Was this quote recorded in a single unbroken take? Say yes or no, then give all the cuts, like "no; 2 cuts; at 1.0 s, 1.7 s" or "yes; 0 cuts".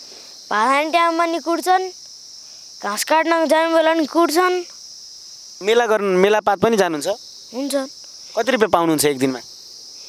no; 1 cut; at 5.4 s